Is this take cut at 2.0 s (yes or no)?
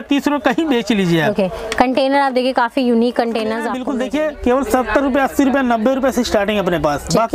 no